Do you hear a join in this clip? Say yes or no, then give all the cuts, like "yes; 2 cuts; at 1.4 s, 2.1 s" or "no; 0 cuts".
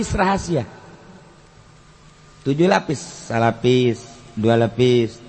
no; 0 cuts